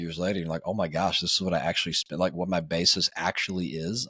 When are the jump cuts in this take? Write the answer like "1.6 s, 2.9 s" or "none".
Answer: none